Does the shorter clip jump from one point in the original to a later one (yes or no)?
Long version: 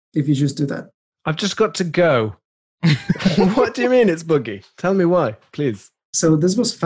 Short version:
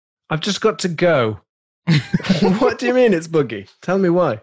no